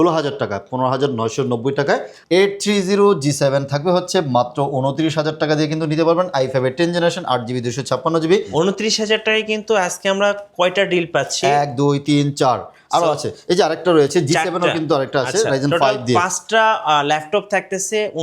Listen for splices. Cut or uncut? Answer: cut